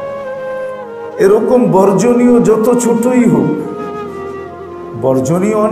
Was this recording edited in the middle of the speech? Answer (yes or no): yes